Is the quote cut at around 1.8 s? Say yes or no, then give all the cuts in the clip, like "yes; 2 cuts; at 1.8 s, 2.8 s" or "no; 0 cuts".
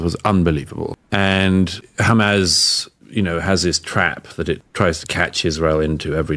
yes; 3 cuts; at 1.0 s, 1.8 s, 4.7 s